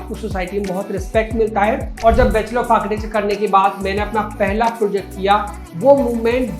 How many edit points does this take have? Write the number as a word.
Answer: two